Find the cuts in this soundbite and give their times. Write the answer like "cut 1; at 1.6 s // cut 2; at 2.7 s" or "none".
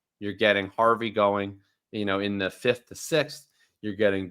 none